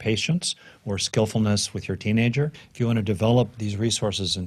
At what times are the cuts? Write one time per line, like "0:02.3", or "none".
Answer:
0:02.6